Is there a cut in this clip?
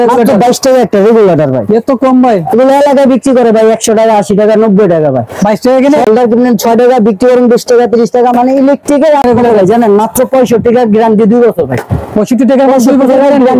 yes; 2 cuts; at 6.1 s, 9.2 s

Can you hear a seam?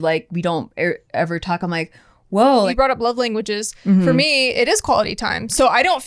yes; 1 cut; at 2.7 s

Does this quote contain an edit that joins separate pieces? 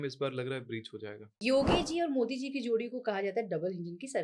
yes; 1 cut; at 1.4 s

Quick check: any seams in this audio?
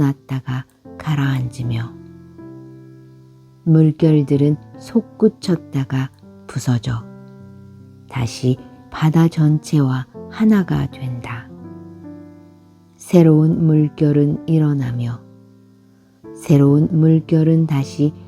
yes; 2 cuts; at 1.9 s, 3.1 s

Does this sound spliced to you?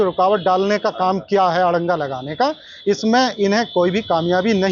no; 0 cuts

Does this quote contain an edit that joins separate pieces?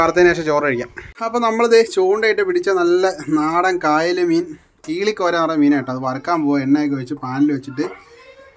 yes; 1 cut; at 1.0 s

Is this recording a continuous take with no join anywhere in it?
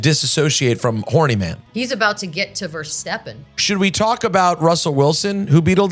no; 2 cuts; at 1.6 s, 3.7 s

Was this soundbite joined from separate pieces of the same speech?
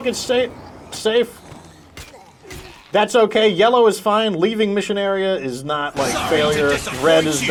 no; 0 cuts

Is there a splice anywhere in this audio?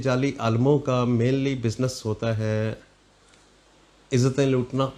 no; 0 cuts

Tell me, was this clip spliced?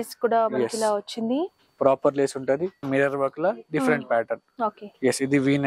yes; 1 cut; at 2.9 s

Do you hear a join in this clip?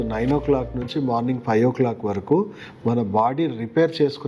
no; 0 cuts

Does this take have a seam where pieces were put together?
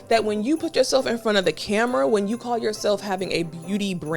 no; 0 cuts

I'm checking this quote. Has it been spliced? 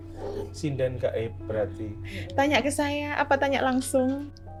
no; 0 cuts

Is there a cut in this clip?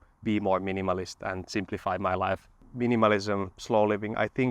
yes; 1 cut; at 2.5 s

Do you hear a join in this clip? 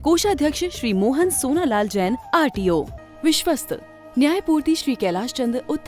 yes; 1 cut; at 3.0 s

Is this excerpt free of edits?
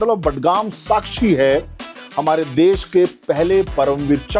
yes; 0 cuts

